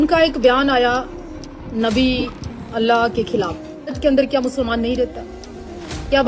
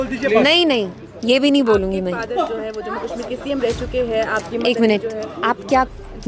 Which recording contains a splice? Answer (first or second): first